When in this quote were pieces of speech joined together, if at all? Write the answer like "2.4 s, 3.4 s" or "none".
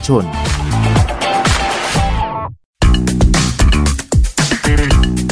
2.7 s